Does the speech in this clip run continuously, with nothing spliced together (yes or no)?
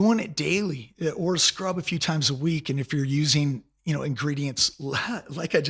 yes